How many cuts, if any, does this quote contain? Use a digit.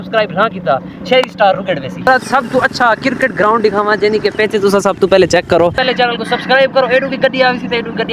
2